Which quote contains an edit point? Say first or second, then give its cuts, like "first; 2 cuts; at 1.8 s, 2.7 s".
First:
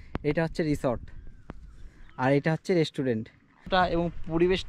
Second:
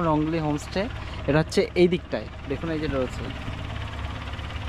first; 1 cut; at 3.7 s